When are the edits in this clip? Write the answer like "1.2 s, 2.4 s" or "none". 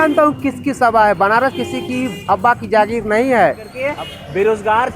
3.8 s